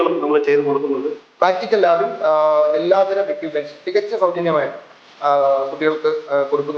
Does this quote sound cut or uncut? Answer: cut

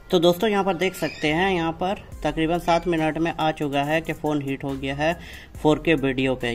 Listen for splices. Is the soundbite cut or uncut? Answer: uncut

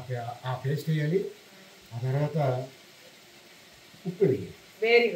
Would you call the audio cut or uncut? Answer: uncut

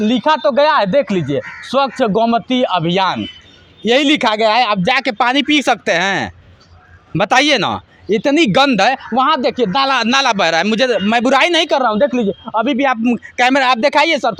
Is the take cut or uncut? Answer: uncut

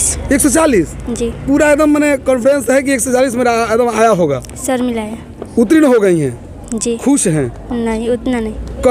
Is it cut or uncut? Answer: uncut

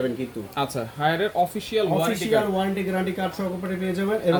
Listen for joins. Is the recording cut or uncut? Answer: uncut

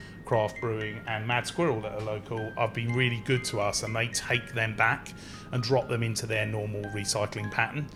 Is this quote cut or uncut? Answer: uncut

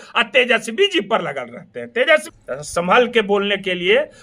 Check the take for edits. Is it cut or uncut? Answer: cut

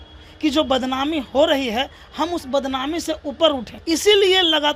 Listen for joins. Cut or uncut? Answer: cut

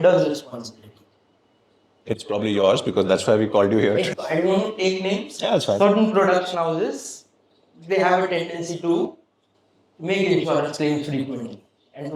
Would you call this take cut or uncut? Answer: cut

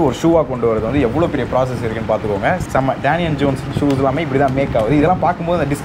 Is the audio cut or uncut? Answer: cut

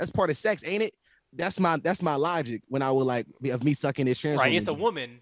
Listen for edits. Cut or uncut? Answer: uncut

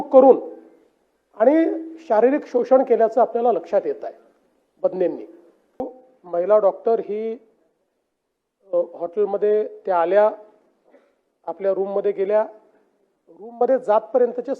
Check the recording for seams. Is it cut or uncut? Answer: cut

